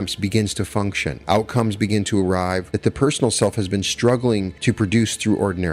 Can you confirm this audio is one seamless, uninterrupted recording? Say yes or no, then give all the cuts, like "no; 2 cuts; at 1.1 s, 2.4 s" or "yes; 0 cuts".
no; 3 cuts; at 1.1 s, 2.7 s, 4.5 s